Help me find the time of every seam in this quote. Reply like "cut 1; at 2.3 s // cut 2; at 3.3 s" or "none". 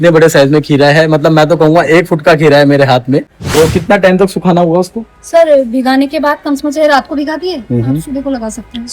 cut 1; at 3.4 s